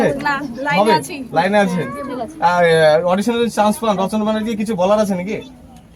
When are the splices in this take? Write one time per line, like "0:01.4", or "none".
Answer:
none